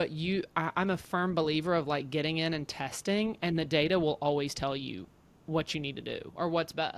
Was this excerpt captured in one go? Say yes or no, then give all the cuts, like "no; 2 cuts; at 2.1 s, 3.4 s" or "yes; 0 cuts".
yes; 0 cuts